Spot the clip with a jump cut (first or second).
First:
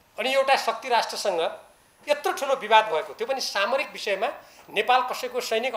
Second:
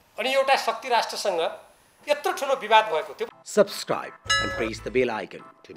second